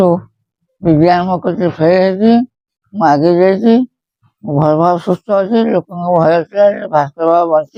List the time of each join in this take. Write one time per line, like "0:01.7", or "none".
none